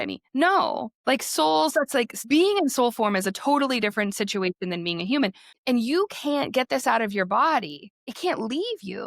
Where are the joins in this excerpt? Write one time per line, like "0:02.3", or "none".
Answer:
0:02.2
0:05.5
0:08.1